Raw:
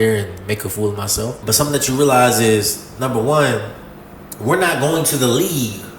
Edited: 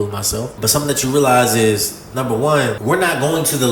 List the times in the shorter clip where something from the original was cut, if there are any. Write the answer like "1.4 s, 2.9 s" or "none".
2.8 s